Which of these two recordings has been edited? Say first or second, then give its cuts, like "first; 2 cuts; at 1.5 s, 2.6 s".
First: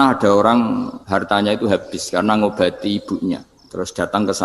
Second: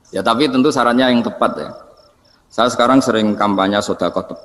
first; 2 cuts; at 1.0 s, 3.6 s